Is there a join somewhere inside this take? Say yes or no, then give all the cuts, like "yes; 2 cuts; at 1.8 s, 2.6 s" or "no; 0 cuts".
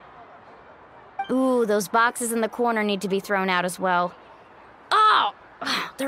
no; 0 cuts